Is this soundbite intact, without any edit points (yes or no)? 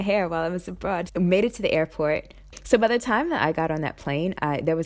no